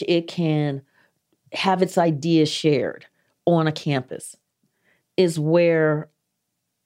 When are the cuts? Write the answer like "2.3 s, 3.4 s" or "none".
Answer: 4.5 s

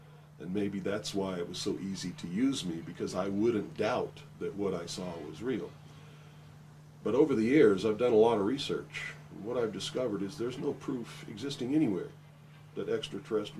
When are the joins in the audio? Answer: 7.8 s

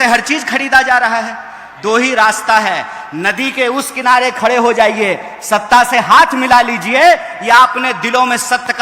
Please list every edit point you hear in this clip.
1.7 s

